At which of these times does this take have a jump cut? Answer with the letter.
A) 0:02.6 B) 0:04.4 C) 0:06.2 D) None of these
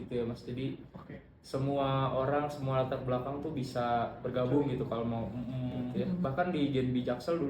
C